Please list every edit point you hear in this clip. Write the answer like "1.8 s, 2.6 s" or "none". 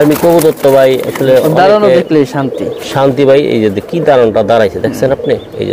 none